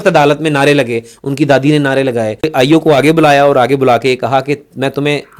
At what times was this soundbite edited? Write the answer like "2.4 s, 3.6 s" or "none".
2.5 s